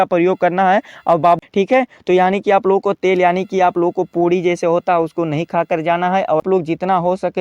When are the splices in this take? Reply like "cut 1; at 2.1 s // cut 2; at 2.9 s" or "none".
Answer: cut 1; at 1.4 s // cut 2; at 6.4 s